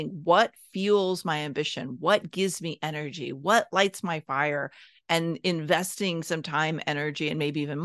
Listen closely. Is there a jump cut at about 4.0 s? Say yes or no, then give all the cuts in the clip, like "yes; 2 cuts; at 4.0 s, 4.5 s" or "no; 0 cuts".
no; 0 cuts